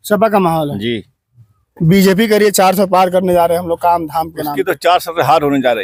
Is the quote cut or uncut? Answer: uncut